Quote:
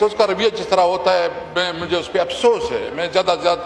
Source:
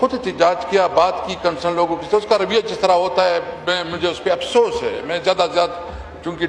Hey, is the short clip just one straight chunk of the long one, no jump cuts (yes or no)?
yes